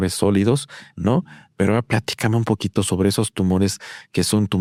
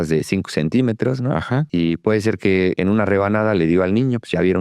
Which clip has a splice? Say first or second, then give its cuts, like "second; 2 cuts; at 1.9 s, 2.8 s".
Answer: second; 2 cuts; at 1.7 s, 2.8 s